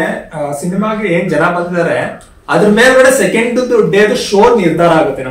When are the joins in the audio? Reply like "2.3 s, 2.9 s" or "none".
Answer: none